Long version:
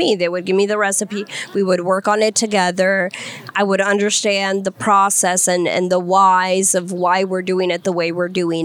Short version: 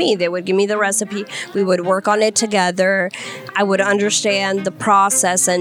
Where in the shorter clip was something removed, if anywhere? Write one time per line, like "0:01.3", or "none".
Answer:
none